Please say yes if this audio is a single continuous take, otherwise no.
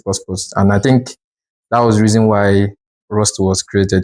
yes